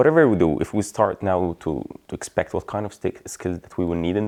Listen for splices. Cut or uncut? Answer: uncut